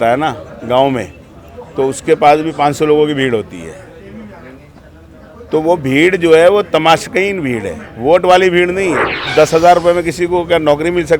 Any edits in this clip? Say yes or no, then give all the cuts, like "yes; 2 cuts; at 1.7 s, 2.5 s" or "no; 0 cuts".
yes; 1 cut; at 9.3 s